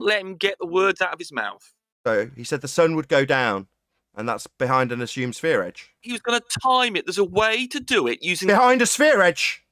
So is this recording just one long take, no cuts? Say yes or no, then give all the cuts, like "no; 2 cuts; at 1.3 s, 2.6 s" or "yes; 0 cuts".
yes; 0 cuts